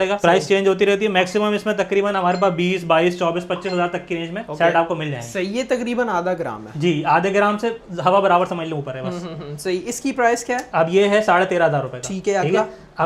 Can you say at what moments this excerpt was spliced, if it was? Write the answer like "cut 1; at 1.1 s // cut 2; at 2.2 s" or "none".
none